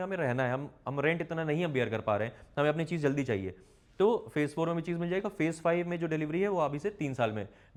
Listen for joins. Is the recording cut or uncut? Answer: uncut